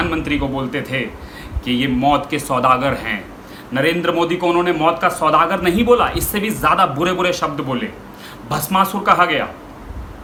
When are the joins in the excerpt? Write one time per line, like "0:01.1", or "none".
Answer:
none

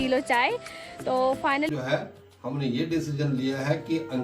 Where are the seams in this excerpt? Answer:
0:01.7

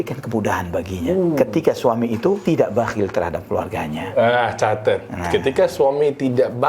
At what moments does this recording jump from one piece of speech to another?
0:02.4

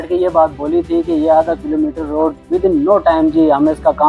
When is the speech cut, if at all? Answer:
none

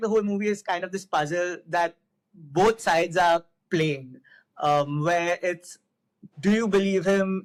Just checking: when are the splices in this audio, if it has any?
none

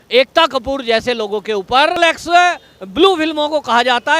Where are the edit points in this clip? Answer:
0:02.0

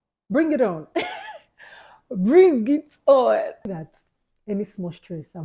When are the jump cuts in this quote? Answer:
0:03.6

